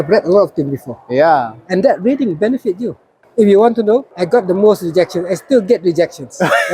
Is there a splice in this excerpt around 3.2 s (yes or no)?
yes